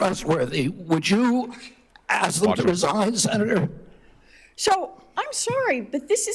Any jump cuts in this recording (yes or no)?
no